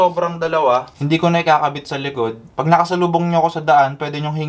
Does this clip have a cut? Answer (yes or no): no